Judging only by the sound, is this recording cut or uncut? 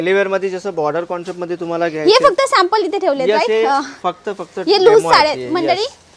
uncut